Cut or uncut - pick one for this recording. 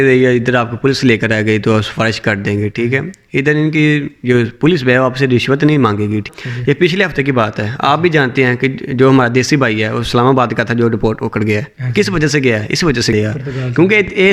cut